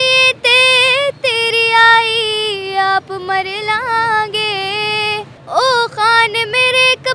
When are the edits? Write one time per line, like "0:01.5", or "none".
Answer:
0:05.4